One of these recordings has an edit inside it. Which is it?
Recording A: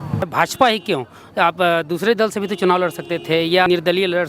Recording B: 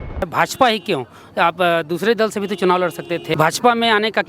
B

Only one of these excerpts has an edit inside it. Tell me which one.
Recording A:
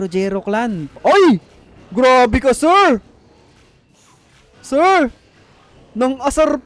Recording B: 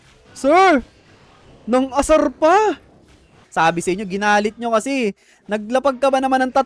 B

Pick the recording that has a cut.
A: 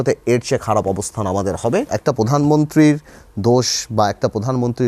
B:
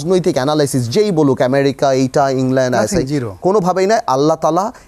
A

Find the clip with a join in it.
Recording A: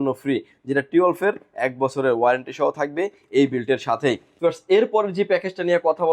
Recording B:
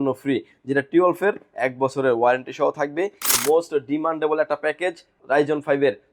B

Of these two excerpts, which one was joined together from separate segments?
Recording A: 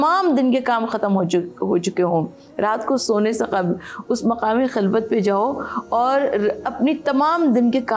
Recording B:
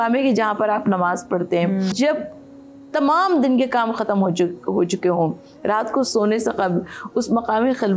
B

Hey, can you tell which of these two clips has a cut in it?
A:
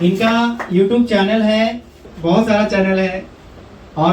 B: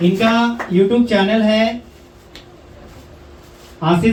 A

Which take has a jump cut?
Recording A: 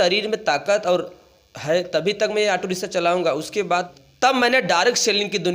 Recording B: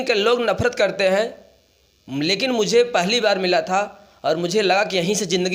A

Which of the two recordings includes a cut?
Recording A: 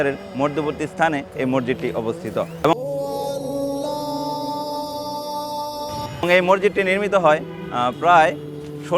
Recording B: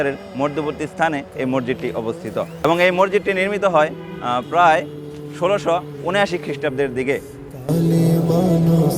A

